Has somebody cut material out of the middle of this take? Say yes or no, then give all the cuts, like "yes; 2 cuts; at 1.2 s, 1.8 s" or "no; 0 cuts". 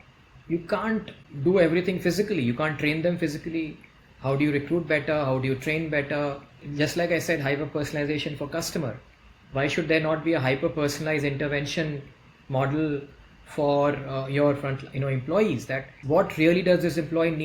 yes; 3 cuts; at 1.2 s, 6.7 s, 16.0 s